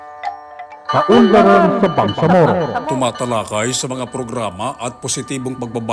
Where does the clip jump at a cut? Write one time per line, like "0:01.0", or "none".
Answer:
0:00.9